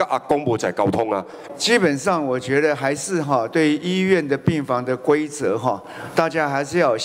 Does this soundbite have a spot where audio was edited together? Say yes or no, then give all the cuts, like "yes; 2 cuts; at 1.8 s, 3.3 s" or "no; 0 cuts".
yes; 1 cut; at 1.4 s